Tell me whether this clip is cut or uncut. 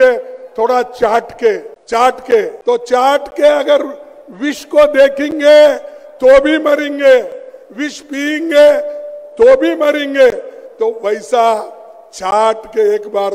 cut